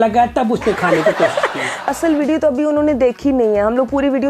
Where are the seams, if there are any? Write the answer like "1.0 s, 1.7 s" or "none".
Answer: 1.9 s